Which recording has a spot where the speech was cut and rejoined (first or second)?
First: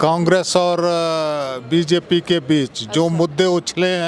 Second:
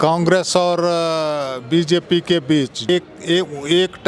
second